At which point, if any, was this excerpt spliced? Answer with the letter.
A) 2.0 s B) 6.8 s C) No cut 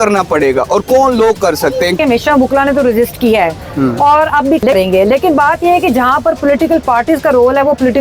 A